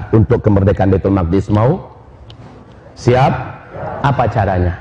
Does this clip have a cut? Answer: no; 0 cuts

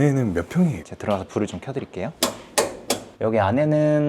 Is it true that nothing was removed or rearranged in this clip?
no; 3 cuts; at 0.9 s, 2.1 s, 3.1 s

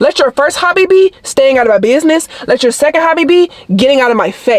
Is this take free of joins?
yes; 0 cuts

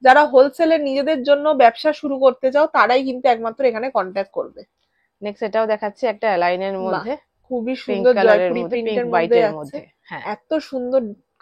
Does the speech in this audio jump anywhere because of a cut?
no; 0 cuts

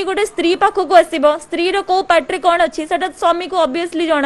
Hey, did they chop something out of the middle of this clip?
no; 0 cuts

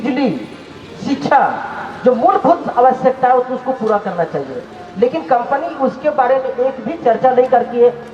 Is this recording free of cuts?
yes; 0 cuts

